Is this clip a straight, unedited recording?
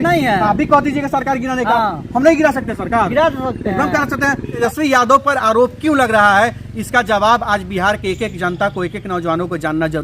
no; 1 cut; at 4.6 s

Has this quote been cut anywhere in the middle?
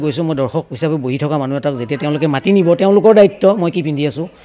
no; 0 cuts

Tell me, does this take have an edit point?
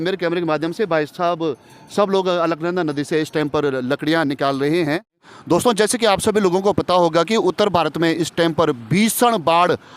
yes; 1 cut; at 5.2 s

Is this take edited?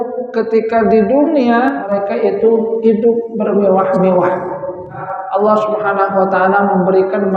yes; 2 cuts; at 1.8 s, 5.1 s

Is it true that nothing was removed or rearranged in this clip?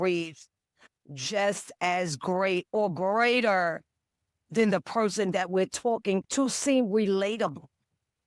no; 1 cut; at 6.3 s

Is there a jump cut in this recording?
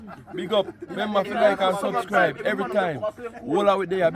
yes; 1 cut; at 0.9 s

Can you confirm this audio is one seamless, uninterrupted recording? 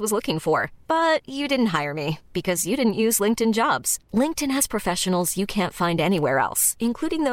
yes; 0 cuts

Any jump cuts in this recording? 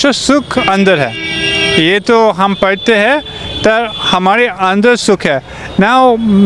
no; 0 cuts

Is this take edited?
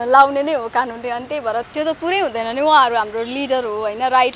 yes; 1 cut; at 1.7 s

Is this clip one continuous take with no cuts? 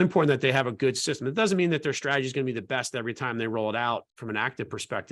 no; 1 cut; at 4.1 s

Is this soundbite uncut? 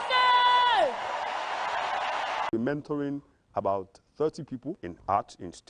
no; 1 cut; at 2.5 s

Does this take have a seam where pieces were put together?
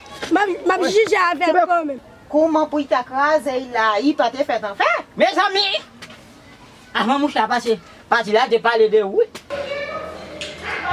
yes; 2 cuts; at 2.0 s, 9.5 s

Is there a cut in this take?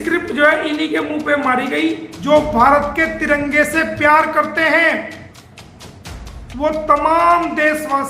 yes; 1 cut; at 2.1 s

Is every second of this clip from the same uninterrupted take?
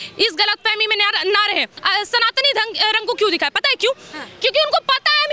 no; 1 cut; at 1.7 s

